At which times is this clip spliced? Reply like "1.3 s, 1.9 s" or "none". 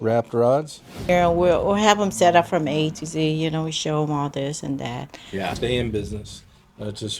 1.1 s, 5.5 s

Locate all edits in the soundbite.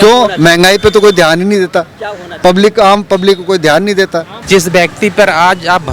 4.3 s

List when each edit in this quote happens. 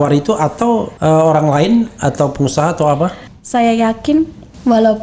0.9 s, 3.3 s

